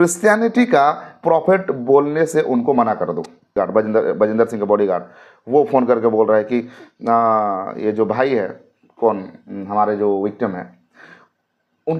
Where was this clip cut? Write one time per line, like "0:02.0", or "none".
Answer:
0:03.6

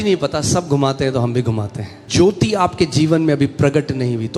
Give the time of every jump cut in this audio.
0:02.1

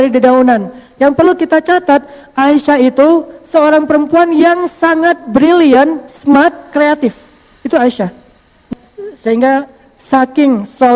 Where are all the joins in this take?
0:08.5

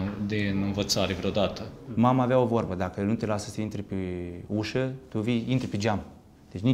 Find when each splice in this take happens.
0:01.9

